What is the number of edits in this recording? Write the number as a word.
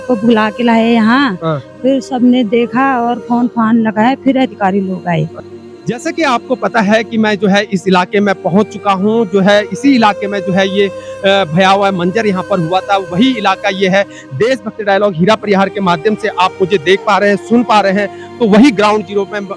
one